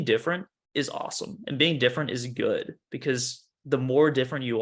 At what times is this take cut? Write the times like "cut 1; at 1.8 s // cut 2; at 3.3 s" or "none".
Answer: none